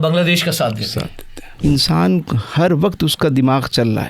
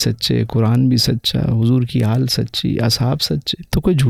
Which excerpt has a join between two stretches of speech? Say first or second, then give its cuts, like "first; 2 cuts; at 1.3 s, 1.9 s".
first; 1 cut; at 1.6 s